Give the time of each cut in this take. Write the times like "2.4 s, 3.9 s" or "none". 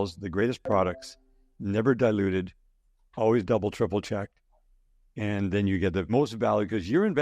6.1 s